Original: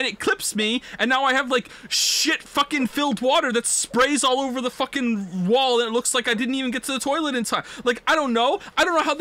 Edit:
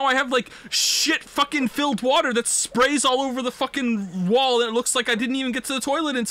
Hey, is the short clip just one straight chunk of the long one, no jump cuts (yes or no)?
yes